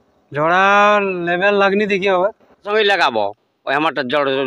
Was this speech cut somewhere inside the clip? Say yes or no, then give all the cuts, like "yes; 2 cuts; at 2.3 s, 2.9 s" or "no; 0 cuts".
yes; 1 cut; at 2.7 s